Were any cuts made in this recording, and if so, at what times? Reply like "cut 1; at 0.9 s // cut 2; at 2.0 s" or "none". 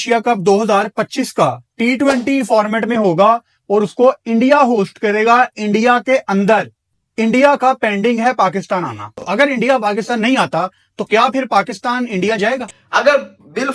cut 1; at 9.1 s // cut 2; at 12.8 s